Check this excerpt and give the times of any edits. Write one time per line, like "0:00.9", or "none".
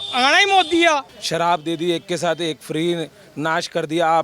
0:01.2